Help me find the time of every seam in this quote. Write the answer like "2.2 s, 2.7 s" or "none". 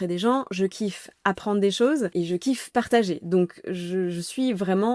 2.1 s